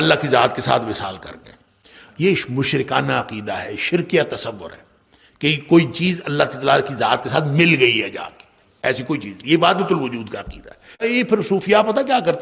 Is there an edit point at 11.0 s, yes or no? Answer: yes